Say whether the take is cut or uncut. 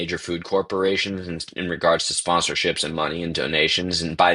uncut